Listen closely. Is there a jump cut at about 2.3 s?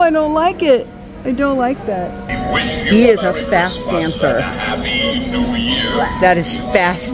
yes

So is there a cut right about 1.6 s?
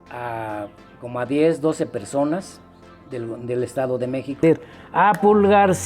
no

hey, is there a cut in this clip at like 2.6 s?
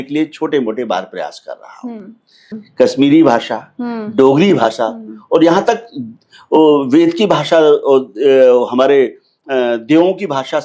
yes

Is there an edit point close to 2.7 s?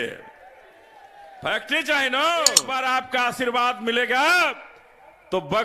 yes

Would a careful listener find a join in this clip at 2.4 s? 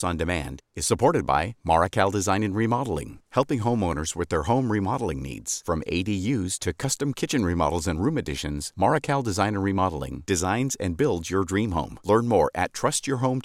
no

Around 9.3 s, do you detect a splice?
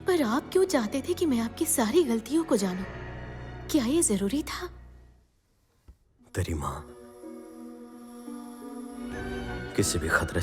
yes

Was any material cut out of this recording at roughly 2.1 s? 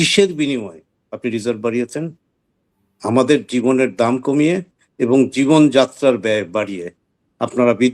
no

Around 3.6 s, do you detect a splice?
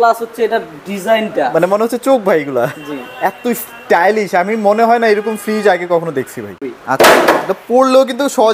no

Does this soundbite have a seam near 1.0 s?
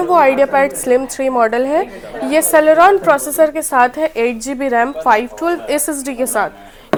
no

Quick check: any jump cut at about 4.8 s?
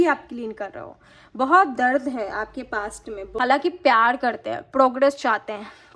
no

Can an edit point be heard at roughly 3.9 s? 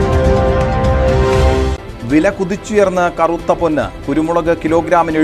no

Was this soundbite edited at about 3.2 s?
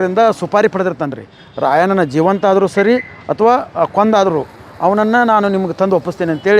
no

